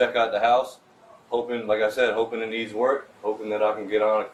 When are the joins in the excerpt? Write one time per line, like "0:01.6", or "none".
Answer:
none